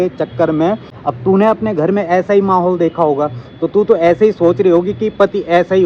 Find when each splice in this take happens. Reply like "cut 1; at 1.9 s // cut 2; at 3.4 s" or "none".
cut 1; at 1.0 s